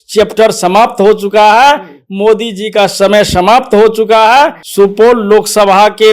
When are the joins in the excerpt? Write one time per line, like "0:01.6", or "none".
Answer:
0:04.6